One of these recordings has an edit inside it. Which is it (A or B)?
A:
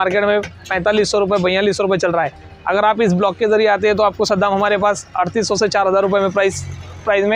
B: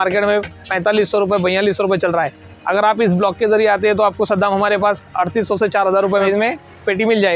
B